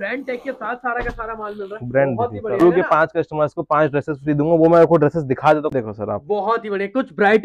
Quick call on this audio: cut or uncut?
cut